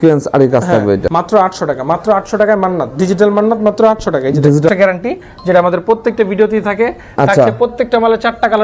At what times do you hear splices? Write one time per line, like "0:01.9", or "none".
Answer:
0:01.0
0:04.7